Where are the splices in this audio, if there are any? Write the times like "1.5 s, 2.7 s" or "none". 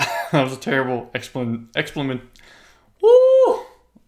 none